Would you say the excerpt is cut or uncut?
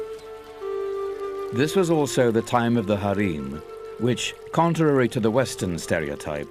cut